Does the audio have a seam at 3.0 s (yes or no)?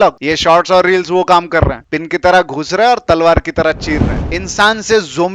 no